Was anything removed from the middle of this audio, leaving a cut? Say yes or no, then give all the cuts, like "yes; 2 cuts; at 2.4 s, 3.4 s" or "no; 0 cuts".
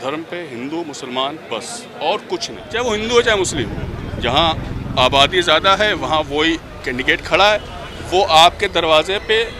yes; 1 cut; at 2.6 s